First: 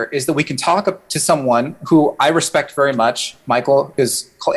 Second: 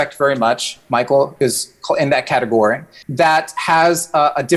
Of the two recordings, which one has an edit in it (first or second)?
second